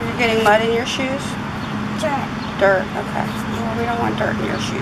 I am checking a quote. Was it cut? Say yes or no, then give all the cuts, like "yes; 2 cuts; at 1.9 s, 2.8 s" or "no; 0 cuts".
no; 0 cuts